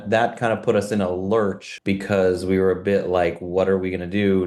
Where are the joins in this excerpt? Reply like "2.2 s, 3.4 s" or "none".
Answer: none